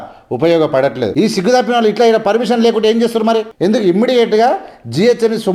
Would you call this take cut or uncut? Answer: cut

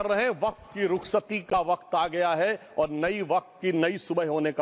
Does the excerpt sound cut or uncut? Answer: uncut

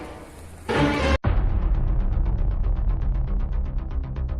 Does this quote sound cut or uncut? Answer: cut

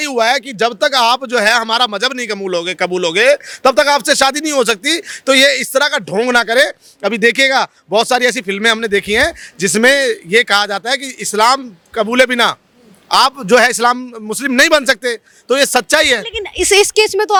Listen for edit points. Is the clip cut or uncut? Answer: uncut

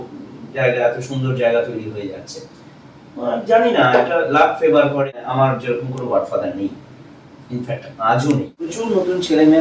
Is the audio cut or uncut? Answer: cut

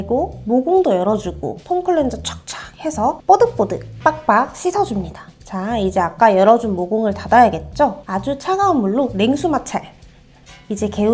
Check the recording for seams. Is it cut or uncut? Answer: uncut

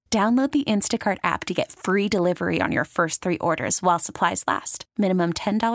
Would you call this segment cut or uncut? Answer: uncut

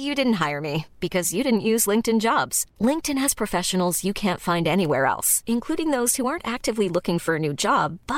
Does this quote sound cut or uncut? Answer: uncut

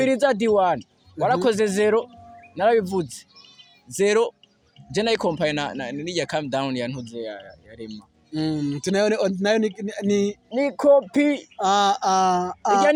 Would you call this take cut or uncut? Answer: uncut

